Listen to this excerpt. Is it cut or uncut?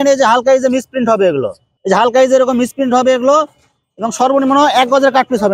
uncut